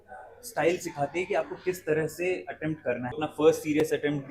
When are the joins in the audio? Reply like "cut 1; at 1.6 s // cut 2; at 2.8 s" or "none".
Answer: cut 1; at 3.2 s